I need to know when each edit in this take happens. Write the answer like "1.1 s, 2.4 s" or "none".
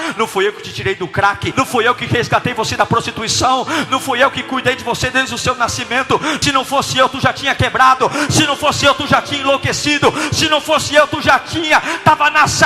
1.5 s, 6.4 s